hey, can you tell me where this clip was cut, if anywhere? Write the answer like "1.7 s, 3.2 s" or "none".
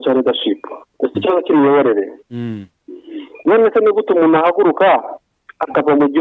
none

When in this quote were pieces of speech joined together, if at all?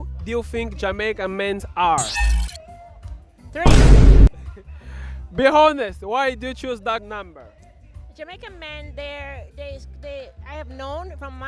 none

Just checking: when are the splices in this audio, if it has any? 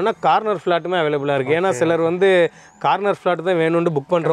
none

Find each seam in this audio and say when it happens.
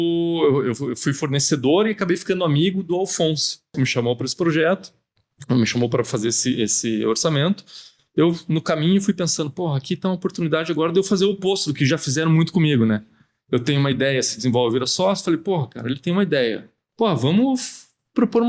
3.7 s, 16.8 s

